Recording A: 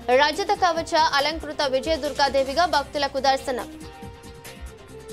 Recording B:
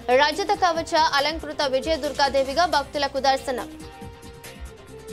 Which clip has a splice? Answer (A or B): A